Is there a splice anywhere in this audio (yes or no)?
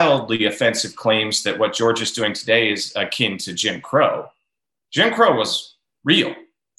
no